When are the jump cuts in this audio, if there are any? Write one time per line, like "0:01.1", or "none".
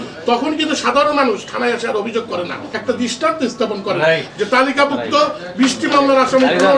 0:02.6